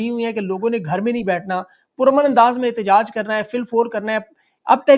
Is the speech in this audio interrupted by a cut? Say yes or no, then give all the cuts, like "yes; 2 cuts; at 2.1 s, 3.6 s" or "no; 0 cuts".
no; 0 cuts